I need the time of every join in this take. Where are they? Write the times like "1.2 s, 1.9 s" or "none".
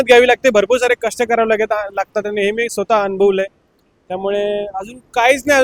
none

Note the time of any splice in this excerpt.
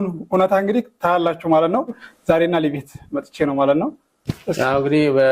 2.0 s

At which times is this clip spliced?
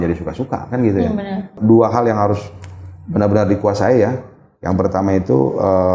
1.5 s

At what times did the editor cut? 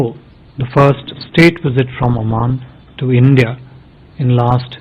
none

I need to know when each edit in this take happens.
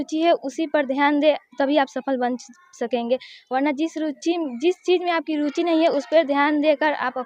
none

